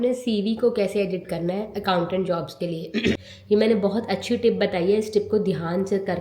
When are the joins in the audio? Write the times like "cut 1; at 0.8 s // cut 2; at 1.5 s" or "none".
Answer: cut 1; at 3.3 s